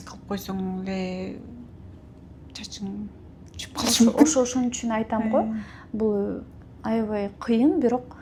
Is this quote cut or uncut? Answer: uncut